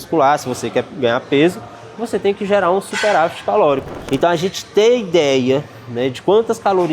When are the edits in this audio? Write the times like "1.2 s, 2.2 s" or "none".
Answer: 4.0 s